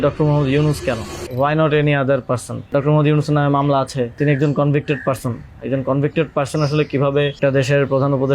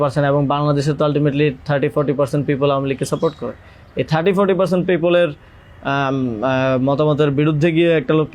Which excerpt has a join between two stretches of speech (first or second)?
first